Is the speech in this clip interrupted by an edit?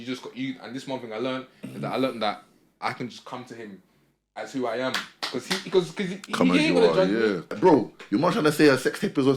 yes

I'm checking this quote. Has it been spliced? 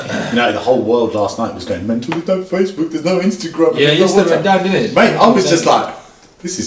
no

